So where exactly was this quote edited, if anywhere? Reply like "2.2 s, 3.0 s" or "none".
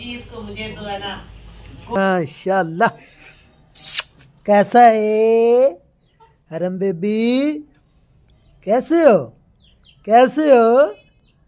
2.0 s